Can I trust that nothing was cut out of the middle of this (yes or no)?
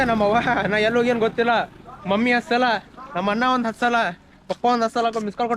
yes